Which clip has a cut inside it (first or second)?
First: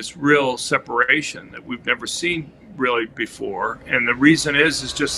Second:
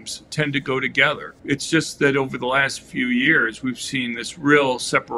second